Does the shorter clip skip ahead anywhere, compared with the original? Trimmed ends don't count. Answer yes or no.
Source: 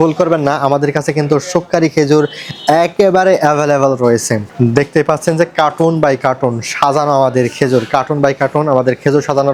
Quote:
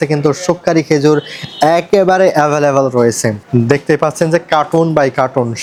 no